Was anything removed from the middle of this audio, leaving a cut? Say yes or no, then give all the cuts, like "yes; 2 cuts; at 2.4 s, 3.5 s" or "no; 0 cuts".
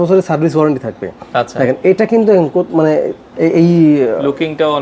no; 0 cuts